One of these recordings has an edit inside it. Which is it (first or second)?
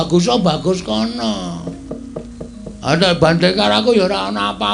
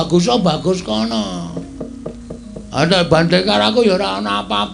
second